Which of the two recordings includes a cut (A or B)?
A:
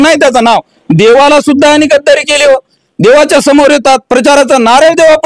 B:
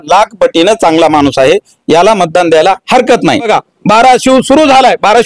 B